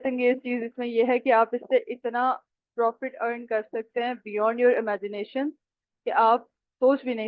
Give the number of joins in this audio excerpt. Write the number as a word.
zero